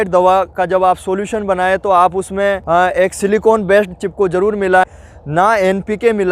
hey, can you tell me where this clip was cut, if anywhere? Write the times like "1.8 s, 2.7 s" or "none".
4.8 s